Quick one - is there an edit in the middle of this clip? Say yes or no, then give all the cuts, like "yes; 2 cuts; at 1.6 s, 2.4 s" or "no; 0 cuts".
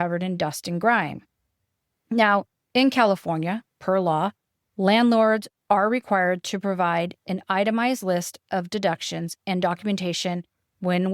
yes; 1 cut; at 2.6 s